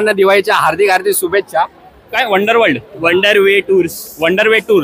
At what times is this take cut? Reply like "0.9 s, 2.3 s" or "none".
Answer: 2.2 s

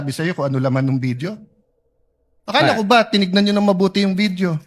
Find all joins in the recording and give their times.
3.8 s

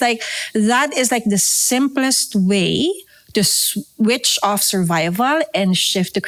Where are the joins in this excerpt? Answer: none

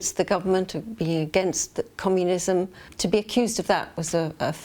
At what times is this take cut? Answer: 2.9 s

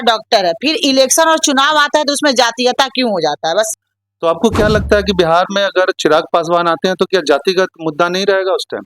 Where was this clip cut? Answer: 3.7 s

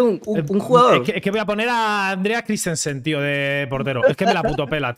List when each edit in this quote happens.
none

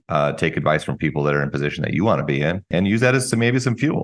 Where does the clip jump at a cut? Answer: 2.7 s

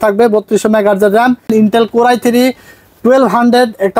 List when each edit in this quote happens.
1.5 s

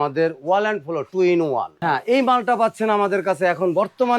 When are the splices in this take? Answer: 1.7 s

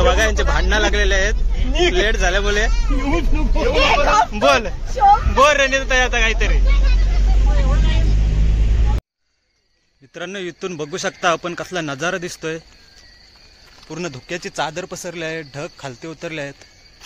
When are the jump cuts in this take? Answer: 9.0 s

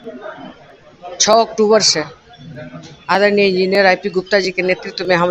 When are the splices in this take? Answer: none

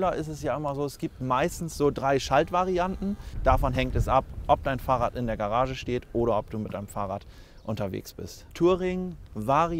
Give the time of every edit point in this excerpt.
3.3 s, 8.5 s

